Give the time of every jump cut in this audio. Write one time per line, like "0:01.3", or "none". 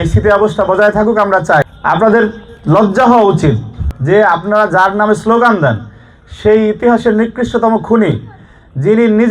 0:01.6
0:03.8